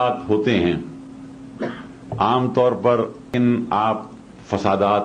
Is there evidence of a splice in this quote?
yes; 1 cut; at 3.3 s

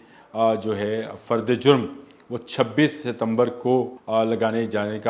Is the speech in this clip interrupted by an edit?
yes; 1 cut; at 4.0 s

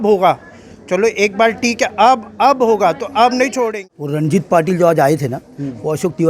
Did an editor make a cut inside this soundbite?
yes; 1 cut; at 3.7 s

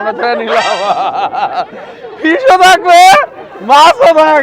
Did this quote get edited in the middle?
no; 0 cuts

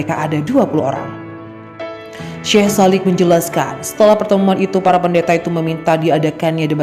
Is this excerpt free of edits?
yes; 0 cuts

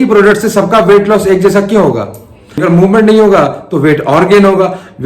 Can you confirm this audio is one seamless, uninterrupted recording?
no; 1 cut; at 2.5 s

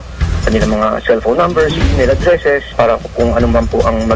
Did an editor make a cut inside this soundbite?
yes; 1 cut; at 2.7 s

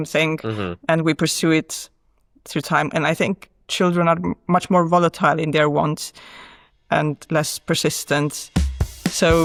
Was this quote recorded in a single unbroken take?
yes; 0 cuts

